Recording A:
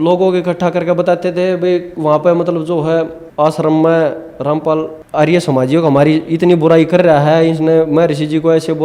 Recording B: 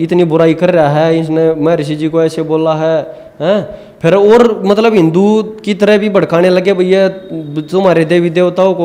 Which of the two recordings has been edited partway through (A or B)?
A